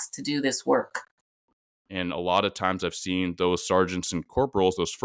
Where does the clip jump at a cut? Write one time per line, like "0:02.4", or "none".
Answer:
0:01.5